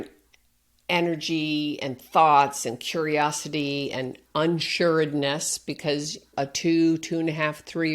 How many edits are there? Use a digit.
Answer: 1